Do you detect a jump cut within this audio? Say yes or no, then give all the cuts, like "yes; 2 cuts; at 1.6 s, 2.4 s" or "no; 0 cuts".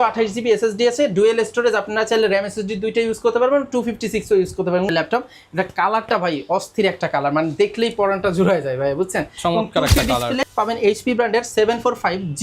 yes; 2 cuts; at 4.9 s, 10.4 s